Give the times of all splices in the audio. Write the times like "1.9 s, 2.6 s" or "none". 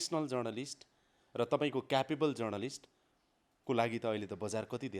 none